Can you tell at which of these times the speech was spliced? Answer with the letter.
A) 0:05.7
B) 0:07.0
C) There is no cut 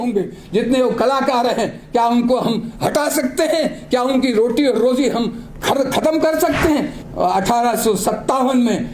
B